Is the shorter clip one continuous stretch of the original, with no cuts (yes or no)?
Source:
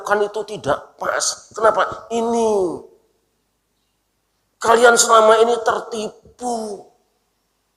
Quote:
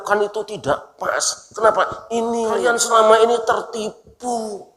no